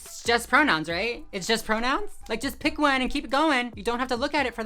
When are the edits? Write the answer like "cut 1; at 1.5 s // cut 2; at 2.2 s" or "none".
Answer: cut 1; at 2.2 s